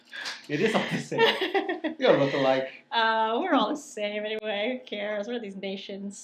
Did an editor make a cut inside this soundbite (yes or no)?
no